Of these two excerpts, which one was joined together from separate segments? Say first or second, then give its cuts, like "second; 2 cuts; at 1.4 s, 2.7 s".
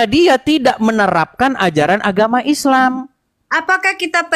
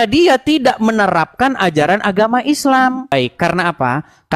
second; 1 cut; at 3.1 s